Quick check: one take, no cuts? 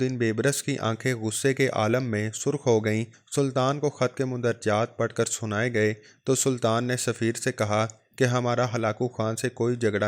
yes; 0 cuts

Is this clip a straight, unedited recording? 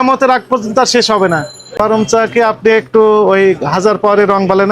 no; 1 cut; at 1.6 s

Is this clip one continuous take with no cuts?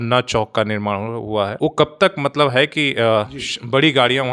yes; 0 cuts

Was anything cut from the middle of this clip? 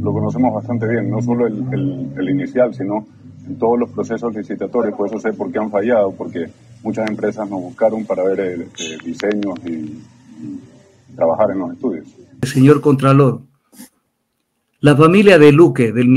yes; 1 cut; at 12.5 s

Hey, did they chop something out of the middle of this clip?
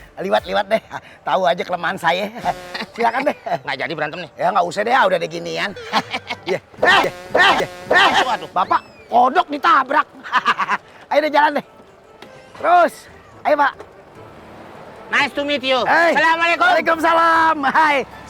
no; 0 cuts

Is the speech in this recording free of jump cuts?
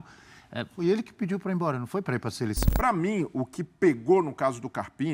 no; 1 cut; at 2.6 s

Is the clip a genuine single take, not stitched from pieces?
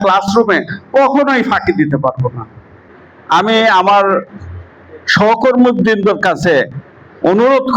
yes; 0 cuts

